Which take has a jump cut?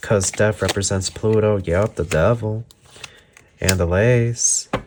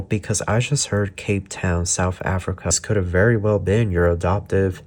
second; 1 cut; at 2.8 s

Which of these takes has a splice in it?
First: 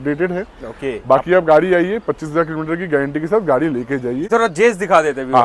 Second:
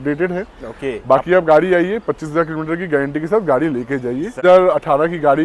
second; 1 cut; at 4.4 s

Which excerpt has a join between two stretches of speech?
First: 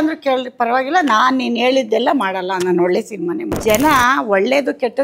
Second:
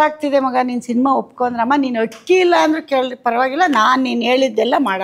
first; 1 cut; at 3.6 s

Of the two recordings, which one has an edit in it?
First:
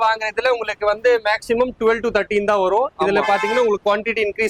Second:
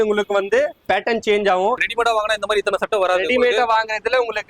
second; 1 cut; at 1.8 s

